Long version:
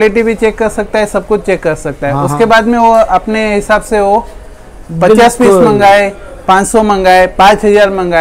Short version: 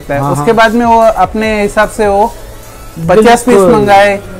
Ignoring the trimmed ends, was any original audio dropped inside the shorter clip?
no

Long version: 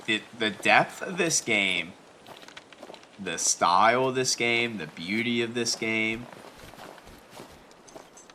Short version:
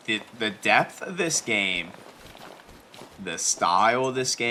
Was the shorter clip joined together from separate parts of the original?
no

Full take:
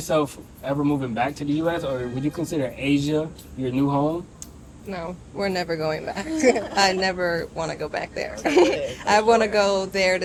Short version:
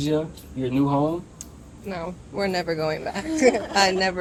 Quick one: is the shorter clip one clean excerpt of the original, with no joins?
yes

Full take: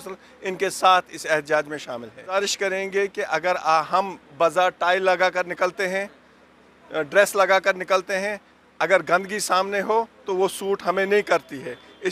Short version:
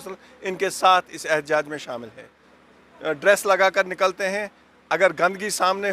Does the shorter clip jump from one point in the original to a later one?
yes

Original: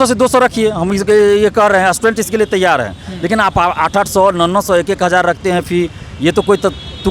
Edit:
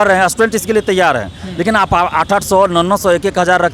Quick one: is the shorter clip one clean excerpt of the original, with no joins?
yes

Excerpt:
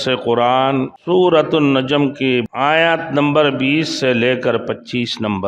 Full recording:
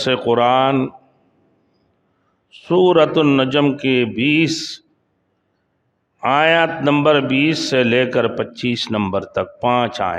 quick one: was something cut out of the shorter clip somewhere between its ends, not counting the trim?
yes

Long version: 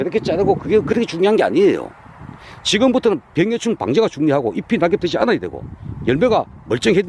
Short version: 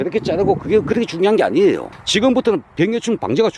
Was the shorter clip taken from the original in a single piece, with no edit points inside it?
no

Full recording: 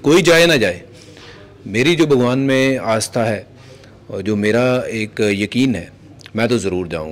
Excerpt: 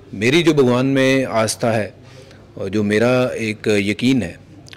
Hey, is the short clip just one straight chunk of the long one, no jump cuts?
yes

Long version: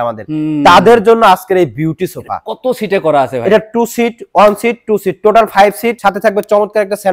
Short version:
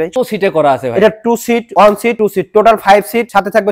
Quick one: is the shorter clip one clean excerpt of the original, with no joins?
no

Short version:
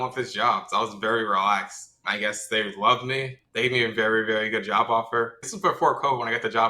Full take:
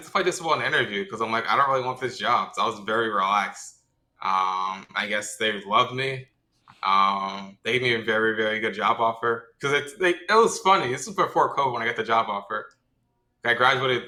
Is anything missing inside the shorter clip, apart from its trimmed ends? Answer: yes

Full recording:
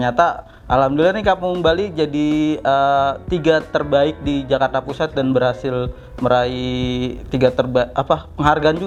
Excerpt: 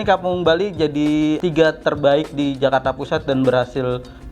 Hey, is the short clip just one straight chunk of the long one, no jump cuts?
no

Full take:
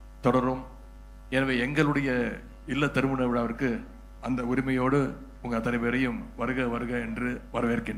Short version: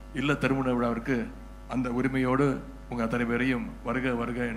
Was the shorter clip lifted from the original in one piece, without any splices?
yes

